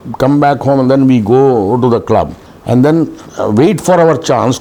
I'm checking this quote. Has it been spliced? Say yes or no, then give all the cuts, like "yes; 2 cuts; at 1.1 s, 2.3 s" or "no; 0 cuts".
no; 0 cuts